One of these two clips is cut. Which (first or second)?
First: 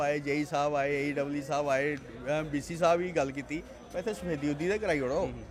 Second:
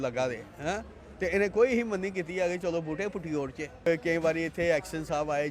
second